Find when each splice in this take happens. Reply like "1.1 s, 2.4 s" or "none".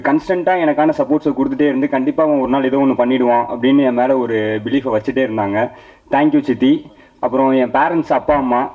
none